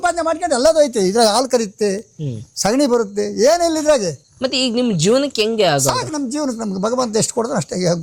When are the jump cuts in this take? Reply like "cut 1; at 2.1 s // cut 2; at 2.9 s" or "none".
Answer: none